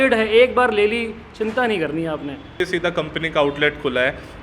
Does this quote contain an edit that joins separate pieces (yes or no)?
yes